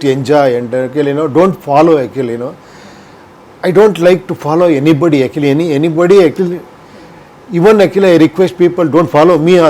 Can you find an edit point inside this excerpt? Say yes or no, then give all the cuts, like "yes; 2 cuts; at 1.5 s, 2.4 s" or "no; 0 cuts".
no; 0 cuts